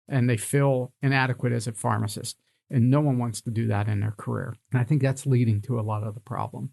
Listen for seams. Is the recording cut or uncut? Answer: cut